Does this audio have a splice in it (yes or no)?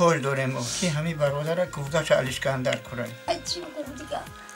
yes